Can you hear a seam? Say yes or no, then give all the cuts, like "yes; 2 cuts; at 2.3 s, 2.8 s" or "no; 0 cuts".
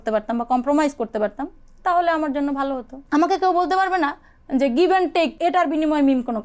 yes; 2 cuts; at 2.9 s, 5.3 s